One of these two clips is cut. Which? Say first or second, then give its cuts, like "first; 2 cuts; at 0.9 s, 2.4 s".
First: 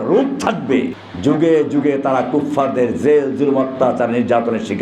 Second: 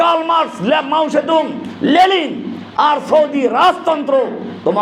first; 1 cut; at 1.0 s